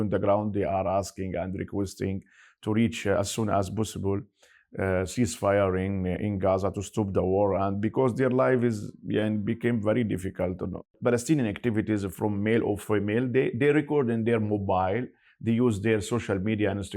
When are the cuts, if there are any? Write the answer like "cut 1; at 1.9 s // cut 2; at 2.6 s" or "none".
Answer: cut 1; at 10.9 s